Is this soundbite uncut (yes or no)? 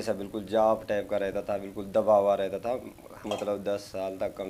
no